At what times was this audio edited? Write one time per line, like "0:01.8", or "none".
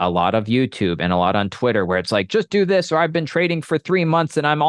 none